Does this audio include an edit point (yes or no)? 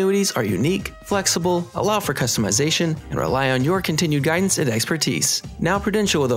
no